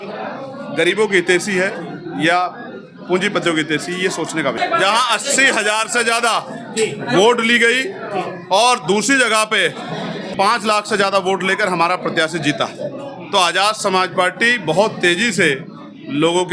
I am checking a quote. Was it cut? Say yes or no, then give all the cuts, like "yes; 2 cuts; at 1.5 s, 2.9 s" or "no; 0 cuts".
yes; 2 cuts; at 4.6 s, 10.3 s